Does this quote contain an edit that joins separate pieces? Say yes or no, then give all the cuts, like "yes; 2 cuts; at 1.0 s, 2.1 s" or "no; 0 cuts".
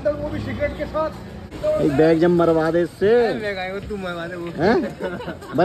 yes; 1 cut; at 1.5 s